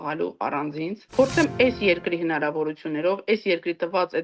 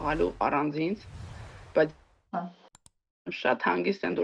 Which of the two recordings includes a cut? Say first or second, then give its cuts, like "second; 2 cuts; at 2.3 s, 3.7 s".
first; 1 cut; at 1.0 s